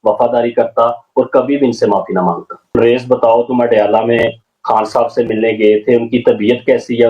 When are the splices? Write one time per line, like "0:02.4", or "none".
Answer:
0:02.8